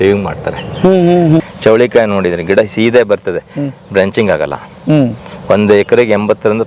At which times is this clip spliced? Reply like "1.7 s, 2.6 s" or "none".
1.4 s

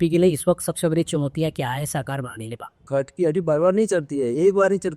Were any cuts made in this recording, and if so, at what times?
2.9 s

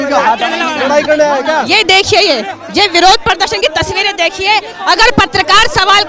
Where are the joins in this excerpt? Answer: none

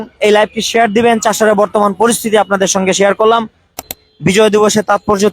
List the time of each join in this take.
3.9 s

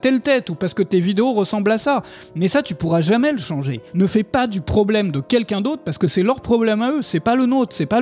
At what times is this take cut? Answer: 3.8 s

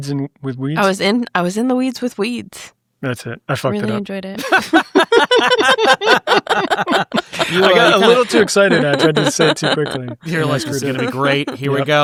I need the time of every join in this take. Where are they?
none

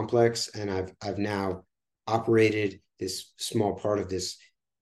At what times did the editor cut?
3.3 s

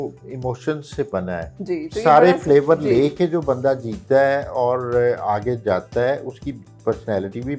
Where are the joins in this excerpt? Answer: 1.5 s

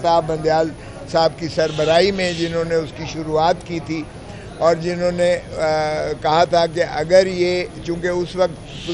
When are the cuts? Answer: none

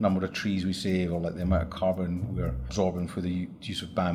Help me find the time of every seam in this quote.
none

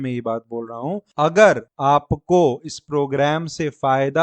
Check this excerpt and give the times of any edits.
1.0 s, 1.7 s

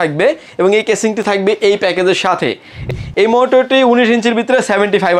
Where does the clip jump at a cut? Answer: 2.9 s

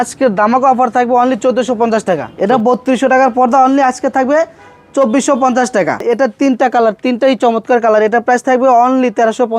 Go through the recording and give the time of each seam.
2.3 s, 6.0 s

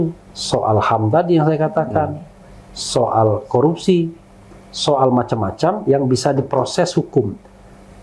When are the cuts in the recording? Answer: none

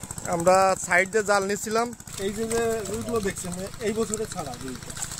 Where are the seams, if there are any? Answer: 2.1 s

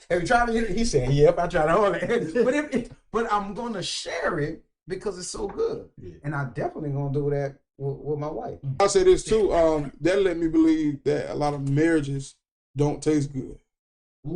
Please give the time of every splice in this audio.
8.8 s

